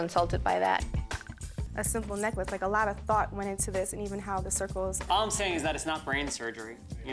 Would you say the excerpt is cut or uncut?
cut